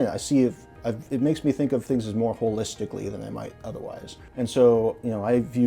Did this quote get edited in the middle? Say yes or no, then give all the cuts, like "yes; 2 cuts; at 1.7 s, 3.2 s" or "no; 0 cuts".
yes; 1 cut; at 4.2 s